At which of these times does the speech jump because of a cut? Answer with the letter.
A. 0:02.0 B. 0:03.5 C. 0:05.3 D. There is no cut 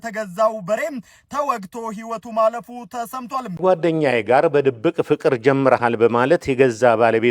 B